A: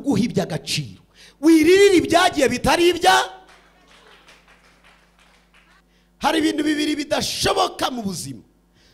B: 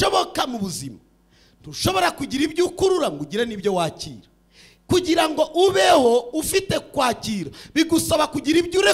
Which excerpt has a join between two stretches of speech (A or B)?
A